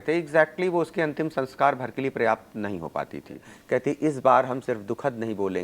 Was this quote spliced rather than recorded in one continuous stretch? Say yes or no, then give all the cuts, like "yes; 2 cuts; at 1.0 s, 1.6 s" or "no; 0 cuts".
yes; 1 cut; at 3.5 s